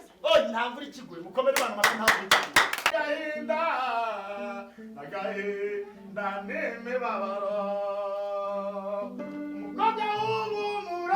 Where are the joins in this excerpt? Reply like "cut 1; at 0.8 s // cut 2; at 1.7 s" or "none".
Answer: cut 1; at 2.9 s